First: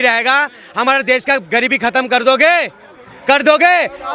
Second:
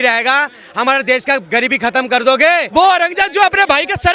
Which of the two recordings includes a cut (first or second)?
second